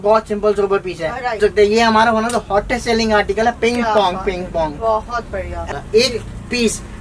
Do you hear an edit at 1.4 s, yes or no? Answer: yes